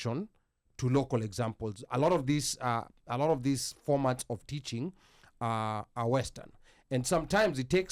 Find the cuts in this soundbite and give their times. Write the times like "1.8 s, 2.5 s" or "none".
none

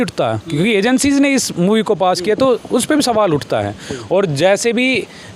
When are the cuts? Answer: none

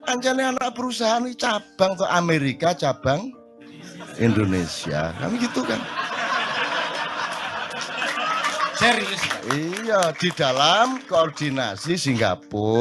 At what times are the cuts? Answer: none

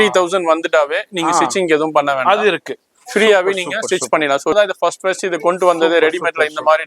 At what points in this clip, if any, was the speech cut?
4.5 s

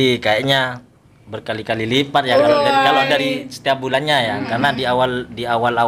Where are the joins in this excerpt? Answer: none

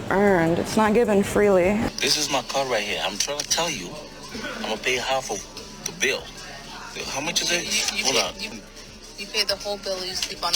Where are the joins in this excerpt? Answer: 1.8 s, 8.5 s

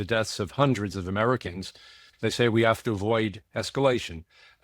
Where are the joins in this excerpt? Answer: 2.0 s

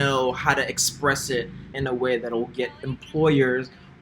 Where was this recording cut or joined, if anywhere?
1.7 s

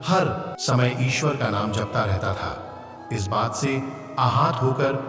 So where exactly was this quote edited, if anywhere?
none

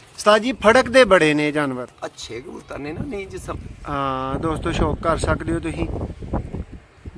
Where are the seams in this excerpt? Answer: 3.5 s

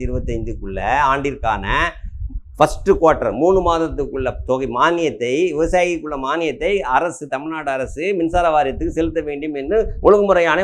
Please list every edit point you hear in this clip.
none

